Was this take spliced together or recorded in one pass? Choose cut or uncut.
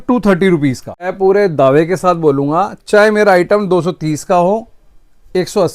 cut